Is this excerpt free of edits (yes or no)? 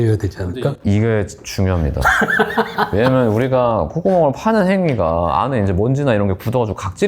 yes